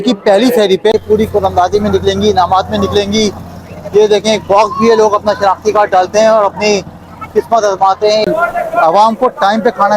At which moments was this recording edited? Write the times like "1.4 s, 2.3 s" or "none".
0.9 s, 8.3 s